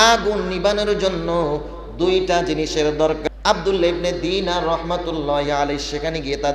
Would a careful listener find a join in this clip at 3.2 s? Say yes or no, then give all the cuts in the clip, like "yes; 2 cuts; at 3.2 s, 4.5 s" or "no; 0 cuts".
yes; 1 cut; at 3.2 s